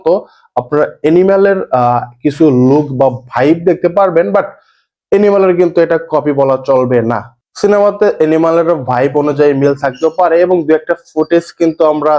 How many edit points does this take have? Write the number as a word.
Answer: zero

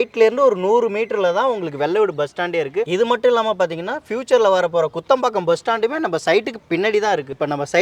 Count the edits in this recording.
one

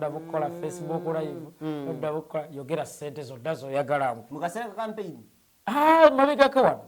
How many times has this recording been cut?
one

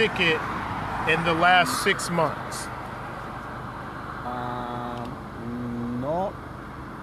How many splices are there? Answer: zero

